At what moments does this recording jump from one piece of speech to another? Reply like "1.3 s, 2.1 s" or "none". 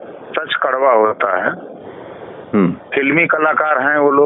none